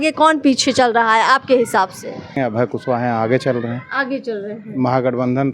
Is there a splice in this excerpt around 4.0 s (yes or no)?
no